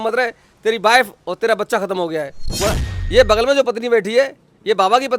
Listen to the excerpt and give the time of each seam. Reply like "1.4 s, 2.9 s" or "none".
2.6 s